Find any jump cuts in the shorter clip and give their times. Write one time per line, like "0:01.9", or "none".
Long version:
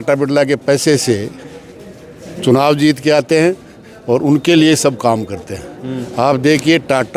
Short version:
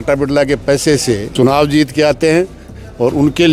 0:01.3